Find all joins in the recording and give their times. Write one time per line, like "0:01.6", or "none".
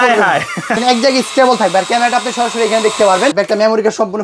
0:00.8
0:03.3